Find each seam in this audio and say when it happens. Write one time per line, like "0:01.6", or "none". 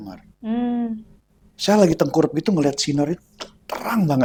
none